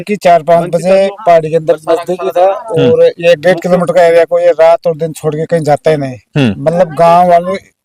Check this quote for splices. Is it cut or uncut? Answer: uncut